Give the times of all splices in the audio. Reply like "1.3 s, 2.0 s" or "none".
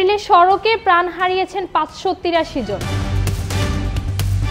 2.9 s